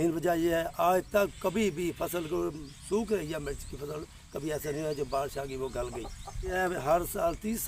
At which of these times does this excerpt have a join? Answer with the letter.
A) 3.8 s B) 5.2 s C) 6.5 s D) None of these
C